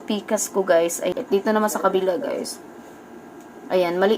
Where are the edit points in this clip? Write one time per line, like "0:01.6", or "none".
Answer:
0:01.1